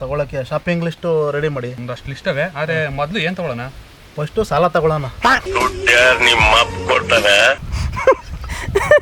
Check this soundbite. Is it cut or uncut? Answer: uncut